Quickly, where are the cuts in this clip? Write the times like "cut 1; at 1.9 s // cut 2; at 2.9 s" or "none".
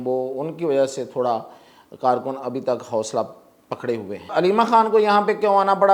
cut 1; at 4.3 s